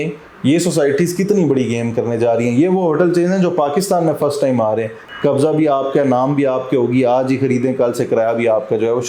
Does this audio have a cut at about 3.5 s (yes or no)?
no